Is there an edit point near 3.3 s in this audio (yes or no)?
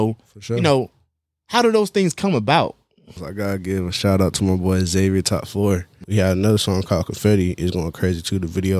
yes